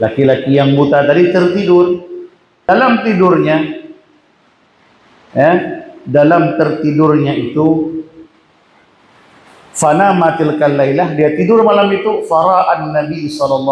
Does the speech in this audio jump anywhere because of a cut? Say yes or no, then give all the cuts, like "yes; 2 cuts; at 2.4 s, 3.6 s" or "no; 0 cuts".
yes; 1 cut; at 2.7 s